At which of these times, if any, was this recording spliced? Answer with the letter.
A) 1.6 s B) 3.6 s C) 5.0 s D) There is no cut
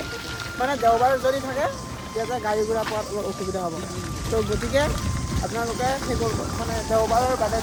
D